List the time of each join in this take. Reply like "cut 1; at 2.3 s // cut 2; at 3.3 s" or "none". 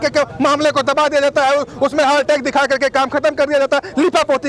none

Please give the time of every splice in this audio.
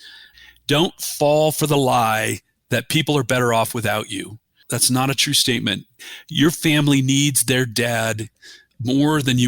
cut 1; at 4.7 s

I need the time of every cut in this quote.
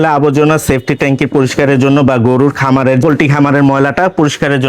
cut 1; at 3.0 s

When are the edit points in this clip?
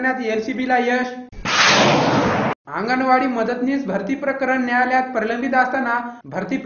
none

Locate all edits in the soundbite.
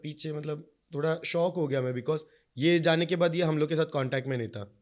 none

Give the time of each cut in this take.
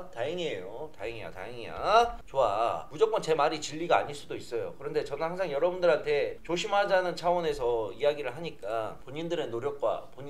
cut 1; at 2.9 s // cut 2; at 8.9 s

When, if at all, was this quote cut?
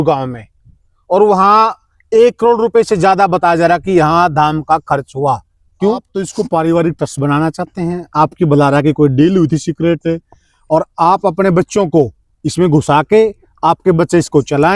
cut 1; at 6.0 s

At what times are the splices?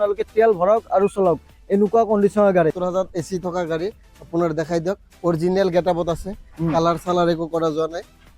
cut 1; at 2.8 s

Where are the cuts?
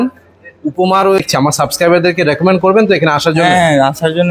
cut 1; at 1.2 s

